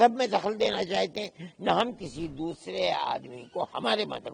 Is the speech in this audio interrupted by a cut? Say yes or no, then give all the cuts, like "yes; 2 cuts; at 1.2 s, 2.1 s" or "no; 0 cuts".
no; 0 cuts